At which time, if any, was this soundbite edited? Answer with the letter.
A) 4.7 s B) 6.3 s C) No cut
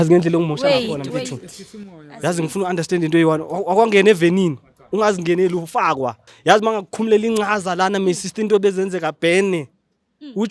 B